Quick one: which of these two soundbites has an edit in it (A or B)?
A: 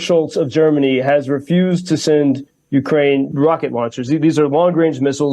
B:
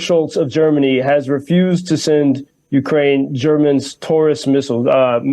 A